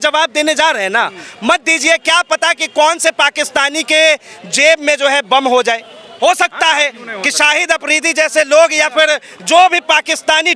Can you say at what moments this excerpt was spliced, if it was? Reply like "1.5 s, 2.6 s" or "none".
6.0 s